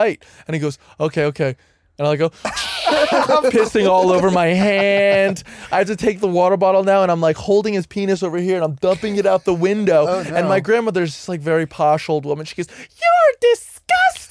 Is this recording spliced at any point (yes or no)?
no